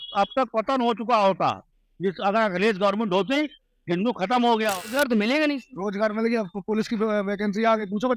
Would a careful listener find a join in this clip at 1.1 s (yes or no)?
no